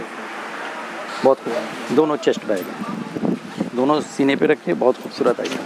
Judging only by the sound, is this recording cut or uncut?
cut